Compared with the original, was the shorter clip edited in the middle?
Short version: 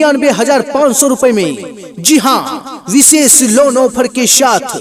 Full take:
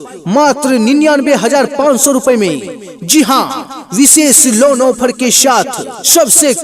no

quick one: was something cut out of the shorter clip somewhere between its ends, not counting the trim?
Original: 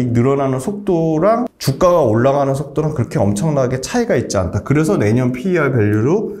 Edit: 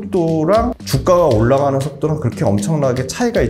no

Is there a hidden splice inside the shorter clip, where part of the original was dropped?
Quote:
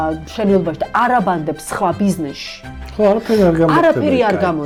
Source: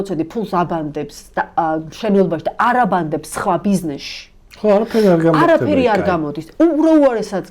no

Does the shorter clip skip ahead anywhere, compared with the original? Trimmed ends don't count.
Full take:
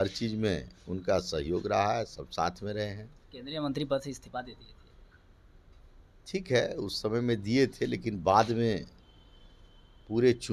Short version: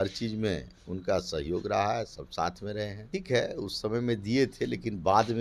yes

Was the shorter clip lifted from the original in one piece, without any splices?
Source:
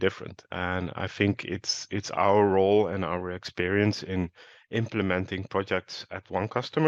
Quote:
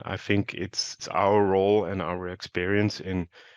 no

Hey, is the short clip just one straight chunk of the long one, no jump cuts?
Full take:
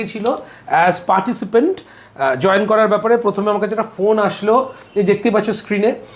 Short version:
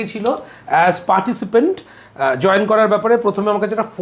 yes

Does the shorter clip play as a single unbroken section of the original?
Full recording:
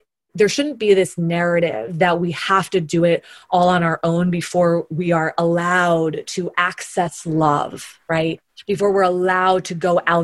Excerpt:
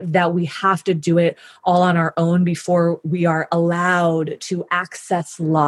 yes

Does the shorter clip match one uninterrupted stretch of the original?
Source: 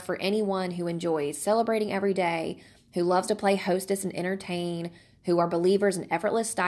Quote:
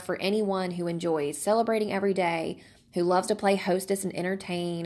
yes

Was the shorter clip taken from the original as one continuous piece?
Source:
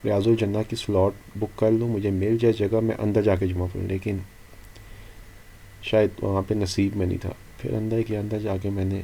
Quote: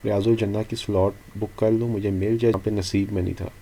no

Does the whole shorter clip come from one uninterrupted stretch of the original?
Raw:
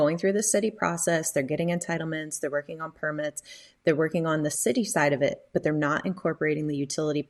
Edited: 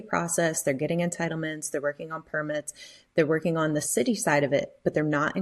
yes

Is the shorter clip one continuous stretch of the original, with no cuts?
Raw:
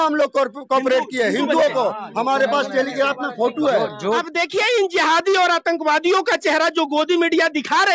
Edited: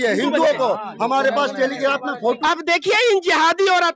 no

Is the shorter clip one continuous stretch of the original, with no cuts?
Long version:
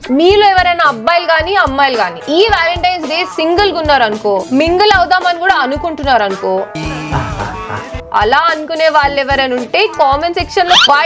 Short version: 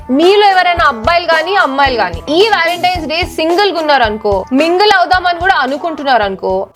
yes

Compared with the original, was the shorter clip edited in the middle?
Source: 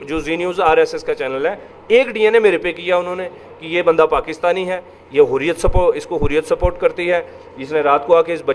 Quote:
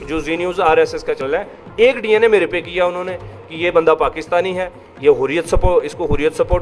yes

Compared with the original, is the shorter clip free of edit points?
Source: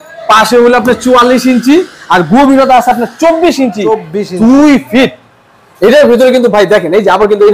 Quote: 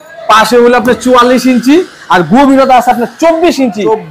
yes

